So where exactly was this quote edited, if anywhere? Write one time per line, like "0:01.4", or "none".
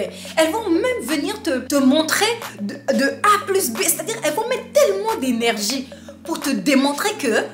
0:01.6